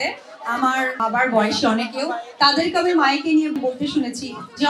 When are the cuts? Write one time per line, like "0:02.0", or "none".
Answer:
0:01.0
0:03.6